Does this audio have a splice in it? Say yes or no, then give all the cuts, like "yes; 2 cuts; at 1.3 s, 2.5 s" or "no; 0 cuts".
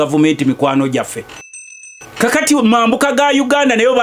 yes; 1 cut; at 1.5 s